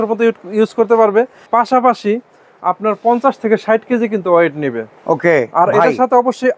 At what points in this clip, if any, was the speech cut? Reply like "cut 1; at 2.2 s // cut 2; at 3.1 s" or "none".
none